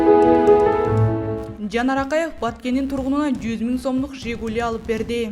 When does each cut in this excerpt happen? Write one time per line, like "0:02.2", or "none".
0:01.5